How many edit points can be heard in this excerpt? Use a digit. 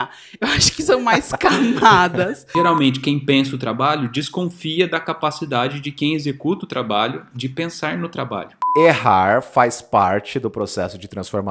2